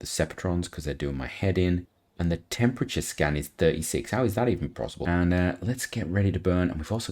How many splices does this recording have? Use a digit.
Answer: 2